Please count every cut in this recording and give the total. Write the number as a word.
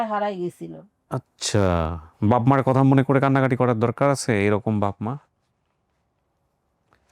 one